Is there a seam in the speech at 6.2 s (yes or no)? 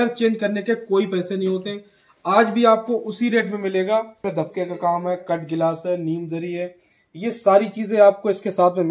no